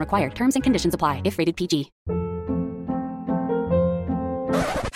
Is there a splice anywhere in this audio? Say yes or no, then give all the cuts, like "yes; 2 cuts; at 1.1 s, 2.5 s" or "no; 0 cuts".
yes; 1 cut; at 2.0 s